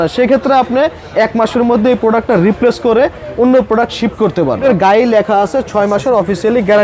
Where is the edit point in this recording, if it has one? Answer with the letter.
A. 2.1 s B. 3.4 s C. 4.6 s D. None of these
C